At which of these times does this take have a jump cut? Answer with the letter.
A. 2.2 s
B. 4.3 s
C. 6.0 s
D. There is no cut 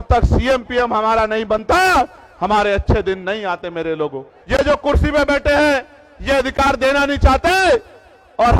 B